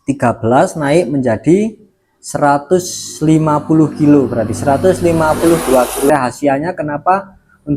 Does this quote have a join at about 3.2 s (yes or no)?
no